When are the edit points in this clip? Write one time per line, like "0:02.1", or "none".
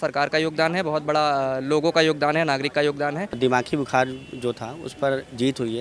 0:03.3